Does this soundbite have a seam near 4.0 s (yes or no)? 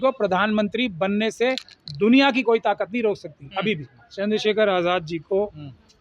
yes